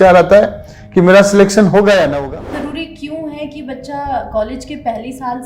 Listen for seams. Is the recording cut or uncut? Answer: cut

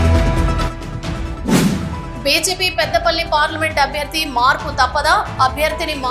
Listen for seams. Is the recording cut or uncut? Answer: cut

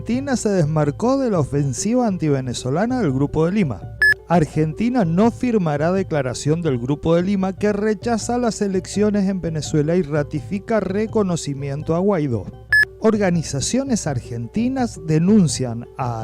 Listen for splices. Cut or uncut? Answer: cut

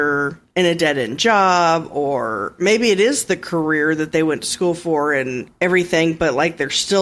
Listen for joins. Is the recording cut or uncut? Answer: uncut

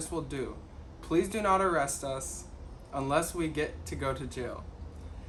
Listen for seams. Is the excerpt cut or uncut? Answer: uncut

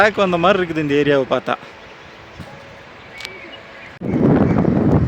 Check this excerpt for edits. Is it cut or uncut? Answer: cut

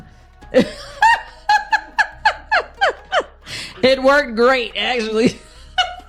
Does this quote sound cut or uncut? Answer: uncut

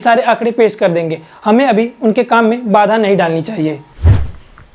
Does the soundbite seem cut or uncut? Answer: uncut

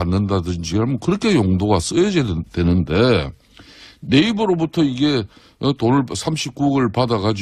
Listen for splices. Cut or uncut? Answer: uncut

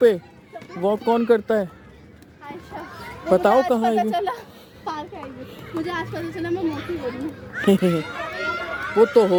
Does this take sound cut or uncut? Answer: uncut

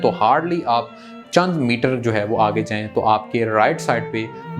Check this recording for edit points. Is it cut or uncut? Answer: uncut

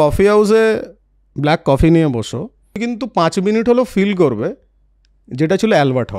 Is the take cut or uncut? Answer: cut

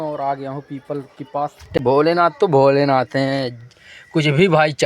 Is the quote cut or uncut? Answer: cut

